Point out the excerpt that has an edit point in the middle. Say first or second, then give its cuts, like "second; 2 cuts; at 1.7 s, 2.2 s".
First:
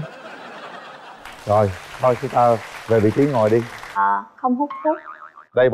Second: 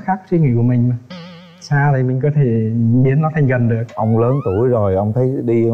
first; 1 cut; at 4.0 s